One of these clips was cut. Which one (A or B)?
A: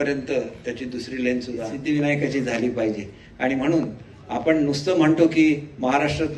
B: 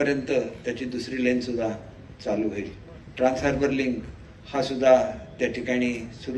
A